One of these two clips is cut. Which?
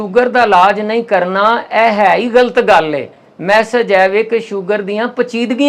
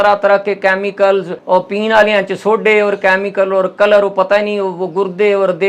second; 1 cut; at 1.4 s

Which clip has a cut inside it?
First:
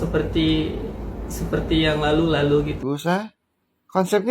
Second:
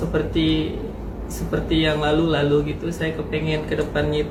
first; 1 cut; at 2.8 s

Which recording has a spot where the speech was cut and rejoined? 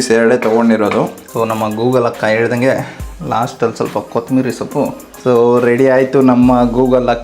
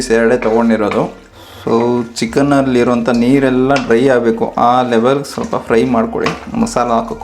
first; 2 cuts; at 1.2 s, 5.1 s

